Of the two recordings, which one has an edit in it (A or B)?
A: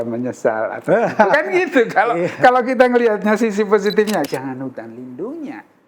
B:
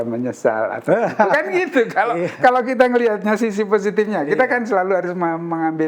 A